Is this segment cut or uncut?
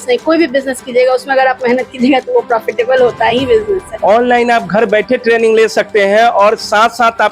cut